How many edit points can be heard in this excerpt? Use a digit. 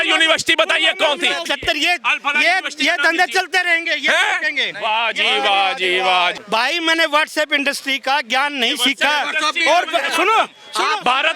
2